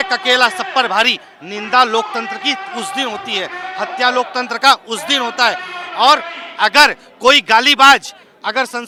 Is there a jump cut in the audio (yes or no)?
no